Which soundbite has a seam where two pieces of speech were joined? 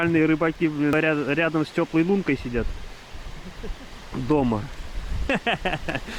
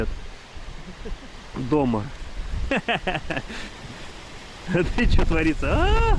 first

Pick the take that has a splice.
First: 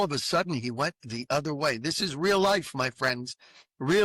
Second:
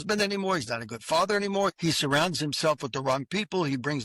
second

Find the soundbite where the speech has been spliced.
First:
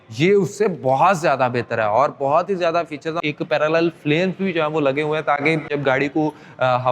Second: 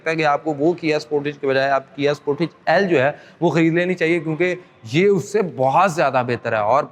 first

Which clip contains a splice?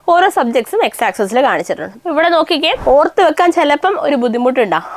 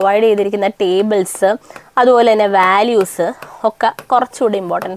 first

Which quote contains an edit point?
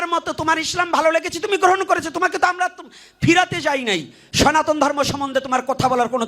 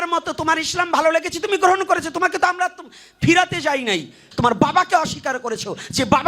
second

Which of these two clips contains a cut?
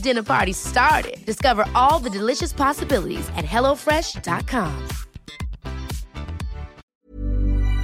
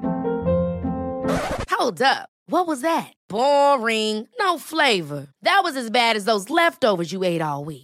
first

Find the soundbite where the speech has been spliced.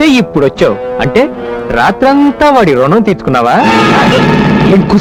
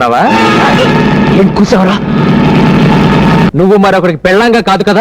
second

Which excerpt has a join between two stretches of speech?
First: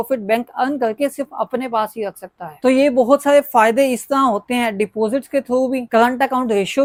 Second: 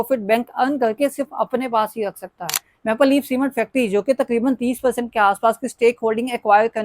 second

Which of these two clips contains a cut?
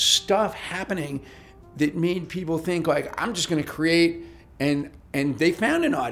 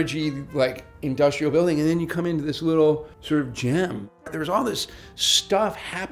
second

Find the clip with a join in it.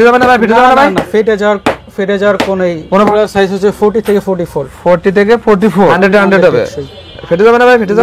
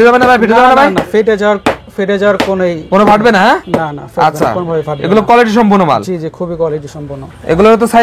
first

